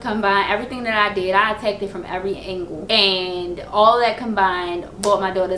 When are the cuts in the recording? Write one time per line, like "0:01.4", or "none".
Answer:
0:02.8